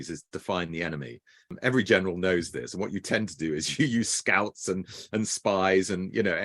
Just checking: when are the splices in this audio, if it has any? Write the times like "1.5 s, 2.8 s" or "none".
1.5 s